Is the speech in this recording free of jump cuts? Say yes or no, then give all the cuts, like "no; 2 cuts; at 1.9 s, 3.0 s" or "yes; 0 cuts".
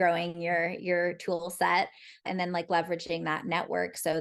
no; 1 cut; at 2.2 s